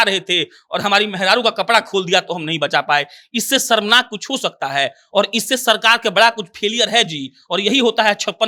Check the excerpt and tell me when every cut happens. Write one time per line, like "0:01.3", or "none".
none